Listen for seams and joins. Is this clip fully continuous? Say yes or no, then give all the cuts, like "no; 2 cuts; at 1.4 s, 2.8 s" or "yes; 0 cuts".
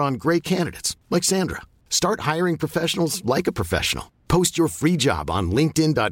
yes; 0 cuts